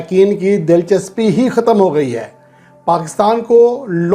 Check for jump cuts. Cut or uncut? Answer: uncut